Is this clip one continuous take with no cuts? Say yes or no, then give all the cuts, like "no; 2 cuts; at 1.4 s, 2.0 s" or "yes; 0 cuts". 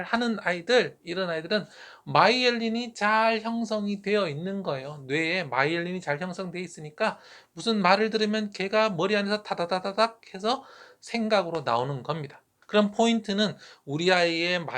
no; 1 cut; at 12.5 s